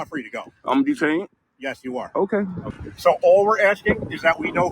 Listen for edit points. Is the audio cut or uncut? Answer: cut